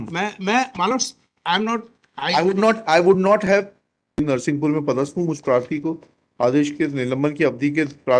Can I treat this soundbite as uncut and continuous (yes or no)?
no